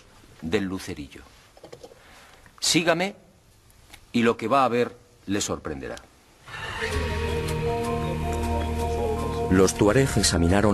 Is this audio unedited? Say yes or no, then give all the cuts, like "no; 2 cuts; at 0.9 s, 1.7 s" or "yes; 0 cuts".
no; 1 cut; at 1.4 s